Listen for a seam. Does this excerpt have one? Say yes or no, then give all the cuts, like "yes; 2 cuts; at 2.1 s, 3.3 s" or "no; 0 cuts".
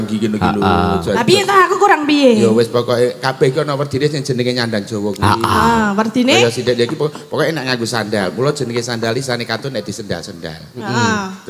no; 0 cuts